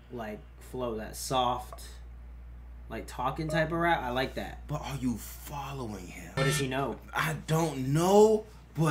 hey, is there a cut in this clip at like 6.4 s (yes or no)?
yes